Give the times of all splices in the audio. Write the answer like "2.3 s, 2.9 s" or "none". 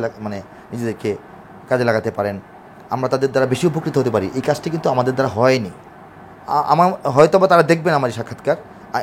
none